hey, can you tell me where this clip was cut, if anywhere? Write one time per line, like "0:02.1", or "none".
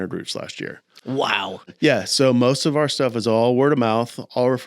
0:01.7